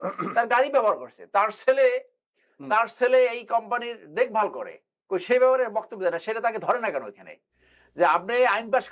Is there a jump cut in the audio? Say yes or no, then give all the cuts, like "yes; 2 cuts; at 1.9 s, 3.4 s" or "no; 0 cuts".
no; 0 cuts